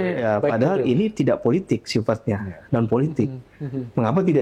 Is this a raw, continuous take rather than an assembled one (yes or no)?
yes